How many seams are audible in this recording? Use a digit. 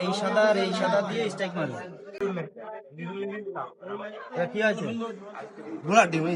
1